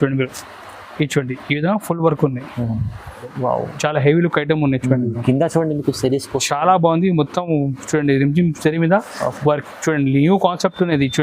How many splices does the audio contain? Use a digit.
1